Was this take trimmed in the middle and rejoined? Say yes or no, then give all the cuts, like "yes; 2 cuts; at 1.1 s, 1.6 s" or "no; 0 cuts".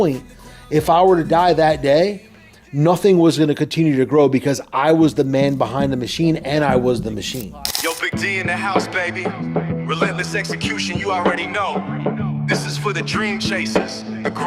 yes; 1 cut; at 7.6 s